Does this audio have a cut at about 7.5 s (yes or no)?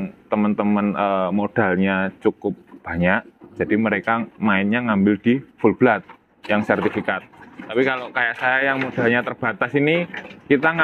no